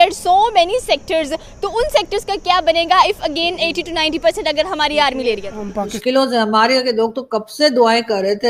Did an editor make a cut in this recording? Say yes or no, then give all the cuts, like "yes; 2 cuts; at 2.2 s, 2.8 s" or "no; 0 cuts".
yes; 1 cut; at 6.0 s